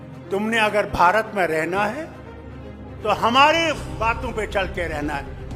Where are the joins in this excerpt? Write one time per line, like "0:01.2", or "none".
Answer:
none